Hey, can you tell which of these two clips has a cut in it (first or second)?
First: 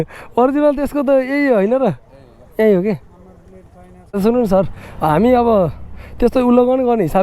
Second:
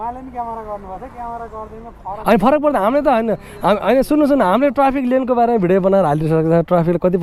first